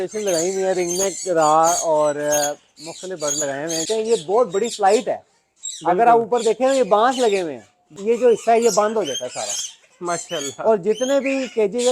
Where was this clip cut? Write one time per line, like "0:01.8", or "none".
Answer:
0:03.8
0:07.9

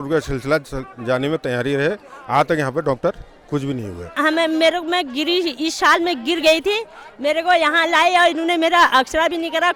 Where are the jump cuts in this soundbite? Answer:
0:04.0

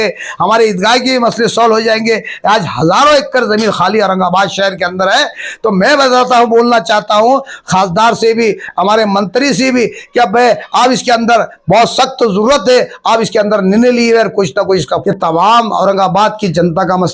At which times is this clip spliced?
0:14.9

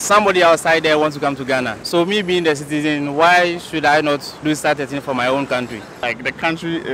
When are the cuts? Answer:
0:01.8
0:04.3
0:06.0

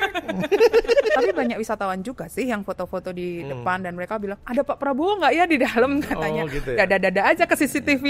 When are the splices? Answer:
0:01.2

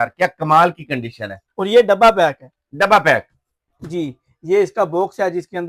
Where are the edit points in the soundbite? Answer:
none

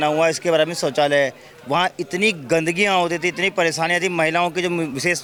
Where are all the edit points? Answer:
none

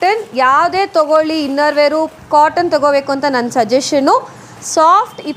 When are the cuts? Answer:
none

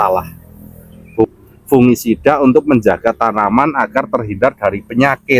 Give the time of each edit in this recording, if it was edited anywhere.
0:01.3

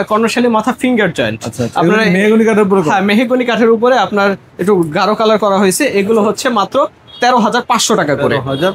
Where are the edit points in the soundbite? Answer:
none

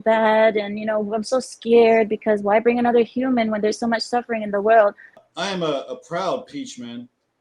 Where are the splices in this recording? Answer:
0:05.1

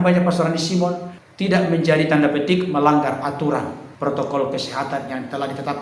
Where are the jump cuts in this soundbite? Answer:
0:03.8

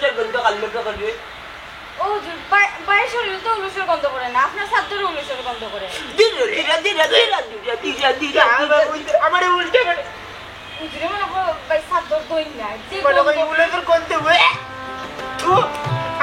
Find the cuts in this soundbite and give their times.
none

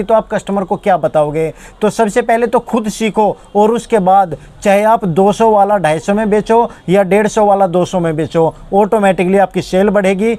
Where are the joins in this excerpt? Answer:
none

